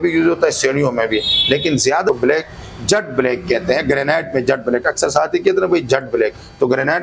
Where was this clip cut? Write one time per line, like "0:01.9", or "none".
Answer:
0:02.1